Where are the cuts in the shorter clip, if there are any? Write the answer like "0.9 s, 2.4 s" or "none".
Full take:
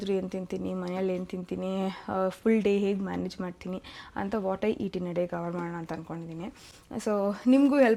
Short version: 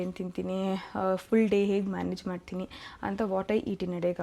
none